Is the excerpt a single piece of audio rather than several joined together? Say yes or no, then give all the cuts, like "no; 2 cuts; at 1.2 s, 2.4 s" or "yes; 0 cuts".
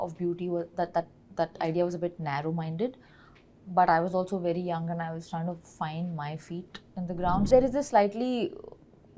no; 1 cut; at 7.5 s